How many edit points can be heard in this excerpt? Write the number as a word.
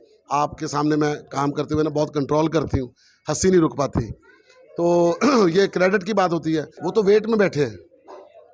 one